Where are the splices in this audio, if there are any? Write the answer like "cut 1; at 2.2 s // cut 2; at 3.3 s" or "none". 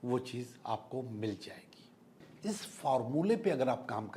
cut 1; at 2.3 s